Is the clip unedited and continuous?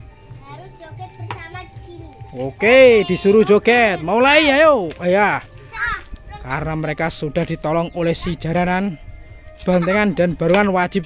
yes; 0 cuts

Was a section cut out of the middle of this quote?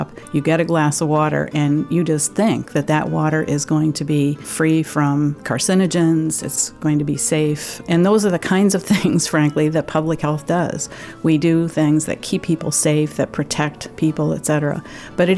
yes; 4 cuts; at 4.5 s, 5.5 s, 6.5 s, 7.8 s

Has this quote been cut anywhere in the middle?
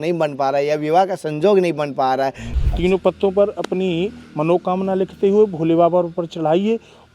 yes; 1 cut; at 2.5 s

